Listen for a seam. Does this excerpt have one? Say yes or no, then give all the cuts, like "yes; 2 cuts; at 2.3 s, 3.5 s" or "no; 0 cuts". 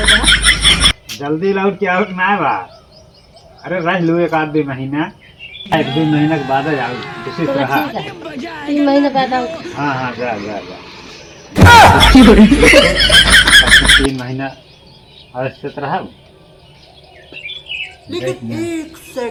no; 0 cuts